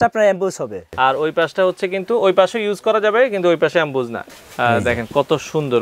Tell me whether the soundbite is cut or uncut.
cut